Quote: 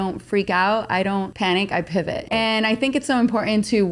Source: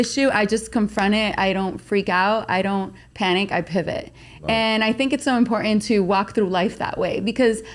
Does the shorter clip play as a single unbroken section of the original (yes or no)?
no